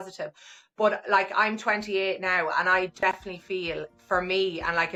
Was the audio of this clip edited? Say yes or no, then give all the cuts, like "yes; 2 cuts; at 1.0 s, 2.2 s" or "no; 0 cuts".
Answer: no; 0 cuts